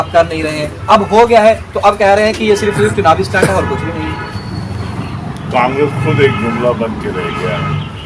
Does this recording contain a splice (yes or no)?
no